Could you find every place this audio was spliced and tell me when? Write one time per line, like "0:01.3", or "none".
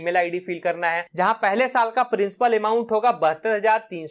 0:01.0